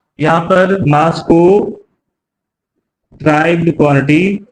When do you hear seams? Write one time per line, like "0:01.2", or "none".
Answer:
none